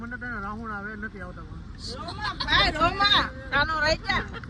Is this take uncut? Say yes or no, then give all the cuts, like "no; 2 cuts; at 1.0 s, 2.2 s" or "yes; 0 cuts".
yes; 0 cuts